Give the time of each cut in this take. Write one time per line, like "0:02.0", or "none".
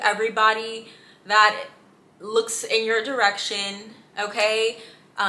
none